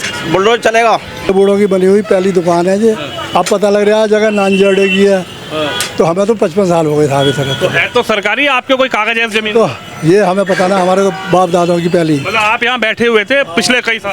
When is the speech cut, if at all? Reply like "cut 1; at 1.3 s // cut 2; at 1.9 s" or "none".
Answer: cut 1; at 1.3 s